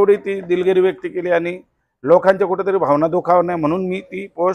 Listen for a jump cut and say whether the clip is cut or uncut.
uncut